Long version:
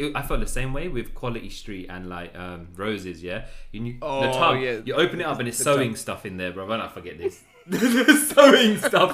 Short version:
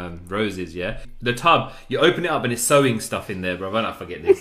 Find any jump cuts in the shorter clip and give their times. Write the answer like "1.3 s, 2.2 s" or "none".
1.4 s